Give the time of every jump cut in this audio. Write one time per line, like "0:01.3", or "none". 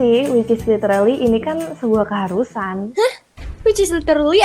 none